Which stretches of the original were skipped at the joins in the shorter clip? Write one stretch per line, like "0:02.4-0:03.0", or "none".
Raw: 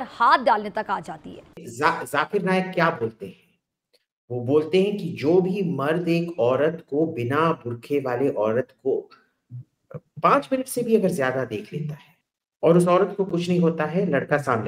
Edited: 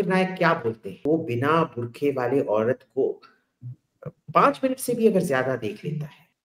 0:03.3-0:06.8